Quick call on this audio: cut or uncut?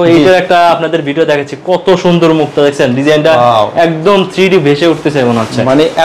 uncut